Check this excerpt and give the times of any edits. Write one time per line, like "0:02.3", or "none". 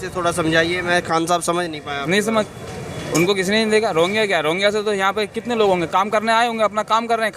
0:02.5